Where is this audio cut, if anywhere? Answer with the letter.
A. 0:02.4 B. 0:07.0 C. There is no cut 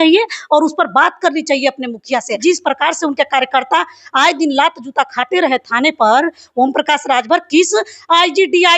A